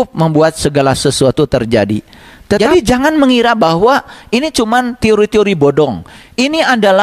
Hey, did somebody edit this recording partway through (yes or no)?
yes